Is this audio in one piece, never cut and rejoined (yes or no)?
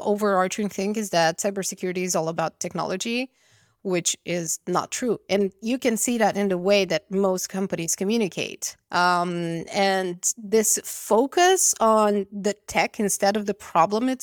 yes